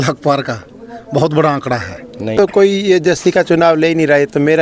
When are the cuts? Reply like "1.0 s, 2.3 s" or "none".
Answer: 2.3 s